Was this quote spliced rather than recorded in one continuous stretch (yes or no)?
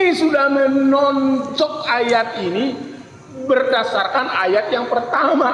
no